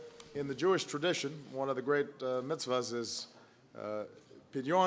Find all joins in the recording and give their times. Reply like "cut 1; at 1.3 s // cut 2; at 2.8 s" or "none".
cut 1; at 1.1 s